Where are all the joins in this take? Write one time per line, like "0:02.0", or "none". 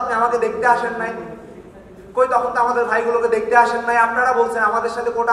none